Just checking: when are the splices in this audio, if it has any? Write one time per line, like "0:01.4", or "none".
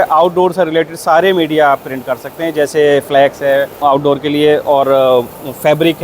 0:03.8